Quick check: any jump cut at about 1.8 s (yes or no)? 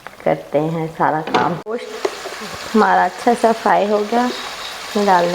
yes